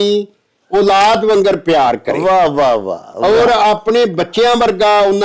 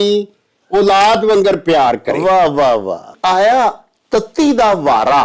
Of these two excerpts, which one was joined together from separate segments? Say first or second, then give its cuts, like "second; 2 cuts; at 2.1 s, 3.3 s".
second; 1 cut; at 3.1 s